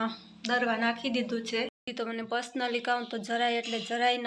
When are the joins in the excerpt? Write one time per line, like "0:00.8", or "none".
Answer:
0:01.9